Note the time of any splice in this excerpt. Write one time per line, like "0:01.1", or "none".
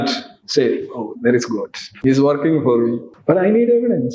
0:01.9
0:03.1